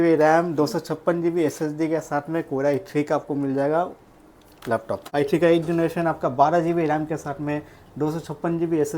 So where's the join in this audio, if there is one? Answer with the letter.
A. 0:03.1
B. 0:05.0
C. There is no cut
B